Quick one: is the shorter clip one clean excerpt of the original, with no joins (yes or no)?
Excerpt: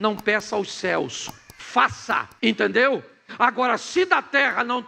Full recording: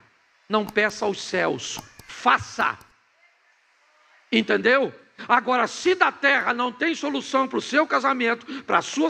no